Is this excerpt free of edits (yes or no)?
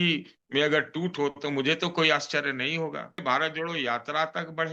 no